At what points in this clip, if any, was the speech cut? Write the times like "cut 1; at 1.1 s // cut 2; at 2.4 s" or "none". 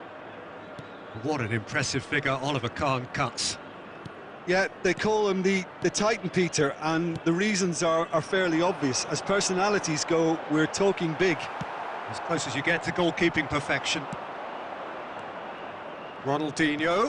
none